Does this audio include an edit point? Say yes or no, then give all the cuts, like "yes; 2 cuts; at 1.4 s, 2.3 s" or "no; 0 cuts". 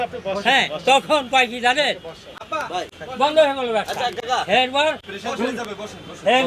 no; 0 cuts